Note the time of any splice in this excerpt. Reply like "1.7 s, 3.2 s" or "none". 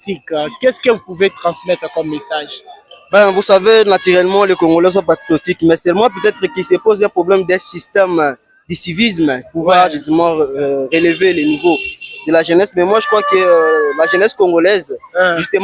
none